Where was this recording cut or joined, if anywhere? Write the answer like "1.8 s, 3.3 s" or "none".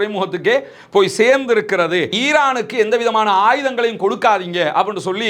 2.2 s